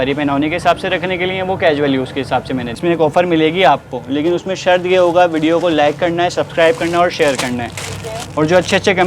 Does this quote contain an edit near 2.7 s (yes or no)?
yes